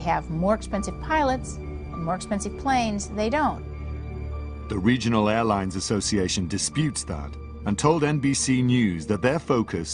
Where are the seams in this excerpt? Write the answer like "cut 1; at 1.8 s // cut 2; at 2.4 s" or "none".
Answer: cut 1; at 6.5 s